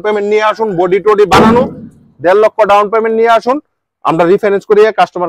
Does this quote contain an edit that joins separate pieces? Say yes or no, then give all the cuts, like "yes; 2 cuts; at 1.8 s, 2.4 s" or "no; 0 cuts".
no; 0 cuts